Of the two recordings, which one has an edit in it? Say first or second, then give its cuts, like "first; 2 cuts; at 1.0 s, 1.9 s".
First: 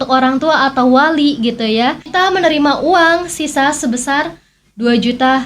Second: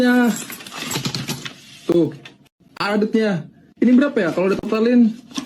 first; 1 cut; at 2.0 s